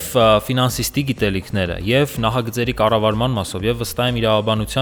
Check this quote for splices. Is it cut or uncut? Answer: uncut